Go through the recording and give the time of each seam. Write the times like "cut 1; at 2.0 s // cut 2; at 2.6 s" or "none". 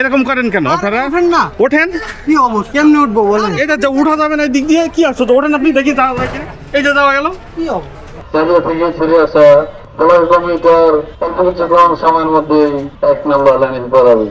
cut 1; at 8.3 s // cut 2; at 9.8 s // cut 3; at 11.2 s // cut 4; at 12.9 s

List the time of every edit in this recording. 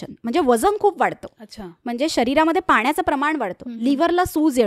none

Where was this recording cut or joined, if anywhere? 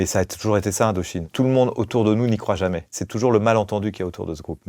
cut 1; at 1.2 s // cut 2; at 2.9 s

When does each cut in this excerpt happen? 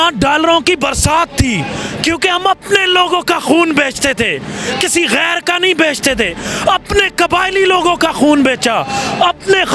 none

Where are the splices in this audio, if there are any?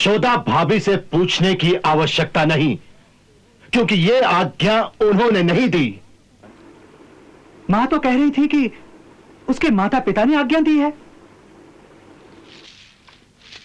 none

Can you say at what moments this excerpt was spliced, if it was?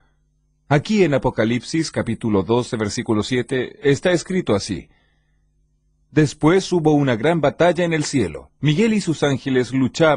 cut 1; at 1.0 s

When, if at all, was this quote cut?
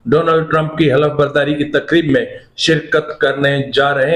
none

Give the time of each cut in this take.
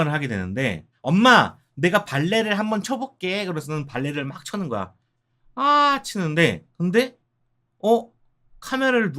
cut 1; at 6.7 s

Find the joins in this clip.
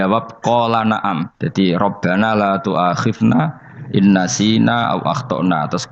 cut 1; at 1.4 s

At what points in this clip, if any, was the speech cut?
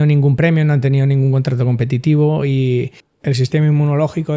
cut 1; at 3.0 s

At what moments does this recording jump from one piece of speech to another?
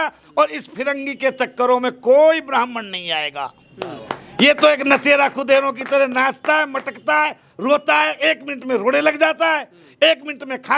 none

